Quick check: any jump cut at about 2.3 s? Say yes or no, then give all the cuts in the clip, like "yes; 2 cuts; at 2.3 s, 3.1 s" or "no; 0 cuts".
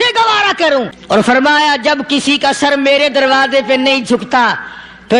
no; 1 cut; at 1.0 s